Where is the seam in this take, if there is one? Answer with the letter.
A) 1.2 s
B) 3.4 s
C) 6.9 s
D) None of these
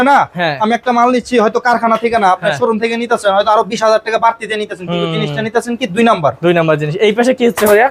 D